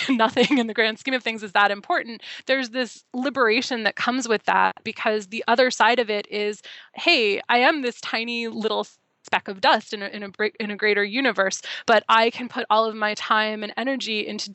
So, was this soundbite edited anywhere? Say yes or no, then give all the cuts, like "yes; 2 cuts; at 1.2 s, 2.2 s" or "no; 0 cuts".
yes; 1 cut; at 4.9 s